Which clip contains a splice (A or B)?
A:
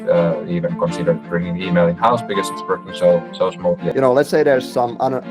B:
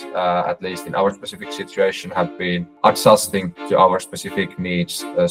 A